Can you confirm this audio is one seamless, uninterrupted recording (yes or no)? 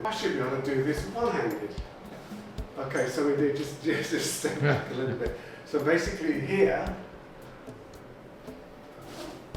yes